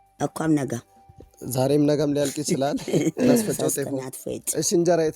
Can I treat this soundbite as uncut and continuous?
no; 1 cut; at 3.5 s

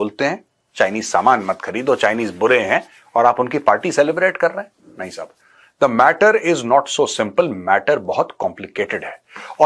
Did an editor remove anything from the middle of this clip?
no; 0 cuts

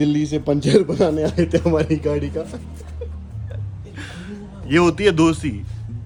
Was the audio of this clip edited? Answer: no; 0 cuts

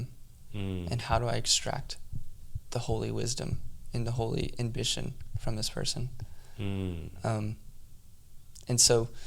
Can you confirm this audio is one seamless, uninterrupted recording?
yes; 0 cuts

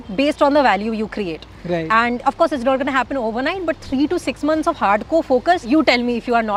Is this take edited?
no; 0 cuts

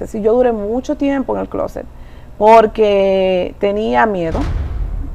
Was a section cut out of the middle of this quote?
no; 0 cuts

